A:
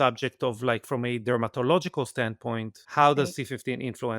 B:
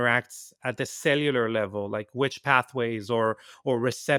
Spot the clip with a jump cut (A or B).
A